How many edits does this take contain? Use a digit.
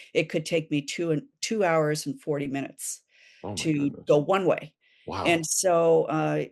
0